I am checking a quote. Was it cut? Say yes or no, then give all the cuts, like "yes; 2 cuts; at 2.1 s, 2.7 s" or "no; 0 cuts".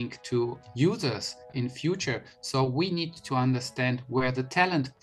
yes; 2 cuts; at 1.5 s, 3.2 s